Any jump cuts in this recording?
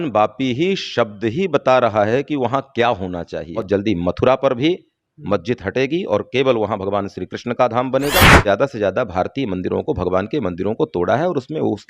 yes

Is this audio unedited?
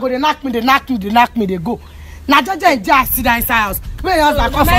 yes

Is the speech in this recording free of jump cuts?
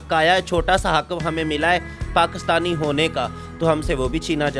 yes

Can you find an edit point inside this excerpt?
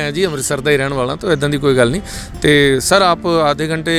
no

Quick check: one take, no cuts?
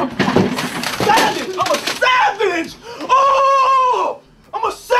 yes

